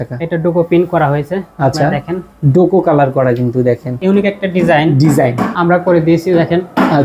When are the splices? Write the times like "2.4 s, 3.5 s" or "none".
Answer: 3.9 s, 5.5 s

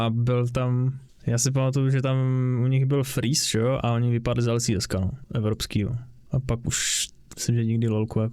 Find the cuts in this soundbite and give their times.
none

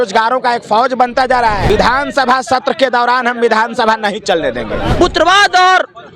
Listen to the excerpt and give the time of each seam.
1.6 s, 4.9 s

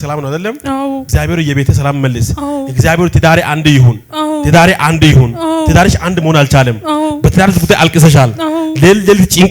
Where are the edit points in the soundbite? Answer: 1.1 s

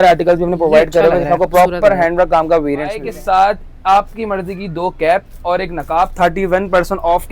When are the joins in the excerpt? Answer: 3.1 s

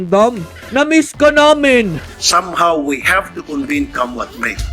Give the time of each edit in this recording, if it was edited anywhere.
2.2 s

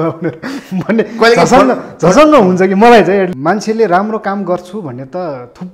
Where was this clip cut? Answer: 3.3 s

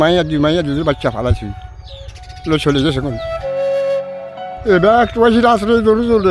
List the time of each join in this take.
none

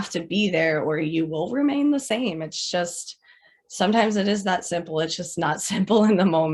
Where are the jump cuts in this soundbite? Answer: none

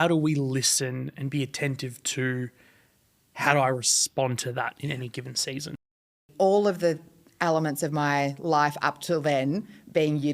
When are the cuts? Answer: 6.3 s

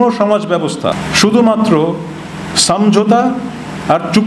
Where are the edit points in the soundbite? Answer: 1.0 s

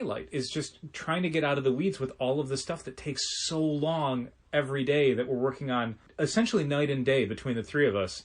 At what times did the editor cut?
6.0 s

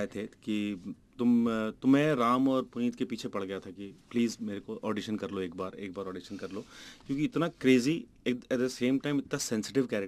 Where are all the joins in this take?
none

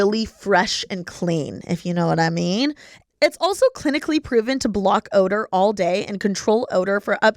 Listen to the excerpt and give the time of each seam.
3.0 s

